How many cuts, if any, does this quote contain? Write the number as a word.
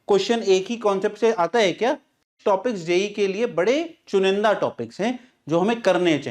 one